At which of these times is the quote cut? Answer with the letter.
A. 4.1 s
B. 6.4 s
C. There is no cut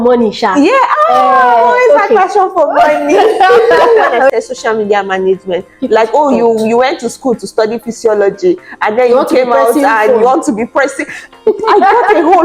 A